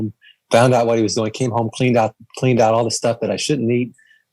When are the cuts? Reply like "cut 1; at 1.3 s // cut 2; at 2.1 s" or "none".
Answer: none